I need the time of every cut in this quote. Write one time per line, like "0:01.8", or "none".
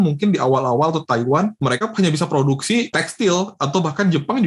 none